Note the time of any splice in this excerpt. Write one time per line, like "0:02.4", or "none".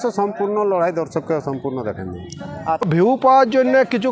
0:02.9